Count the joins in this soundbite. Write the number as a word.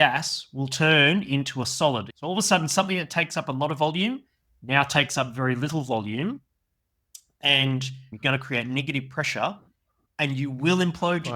two